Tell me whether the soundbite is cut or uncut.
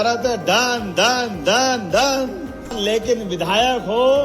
cut